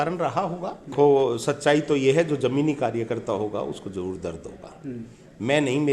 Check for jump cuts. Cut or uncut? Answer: cut